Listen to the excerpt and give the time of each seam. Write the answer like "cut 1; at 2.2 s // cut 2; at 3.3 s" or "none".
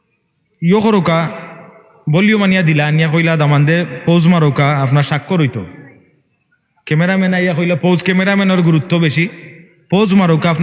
none